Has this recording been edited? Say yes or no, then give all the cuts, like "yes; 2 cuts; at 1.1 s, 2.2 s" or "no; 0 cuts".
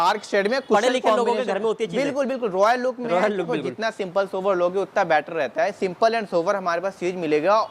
no; 0 cuts